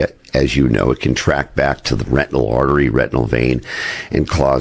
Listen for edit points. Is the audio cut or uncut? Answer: uncut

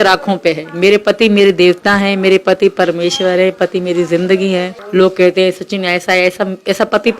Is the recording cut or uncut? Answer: cut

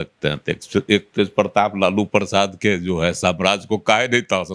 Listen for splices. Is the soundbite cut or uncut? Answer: uncut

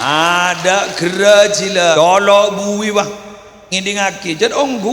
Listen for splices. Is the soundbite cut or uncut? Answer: cut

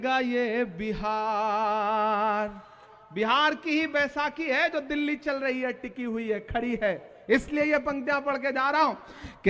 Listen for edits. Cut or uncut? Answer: cut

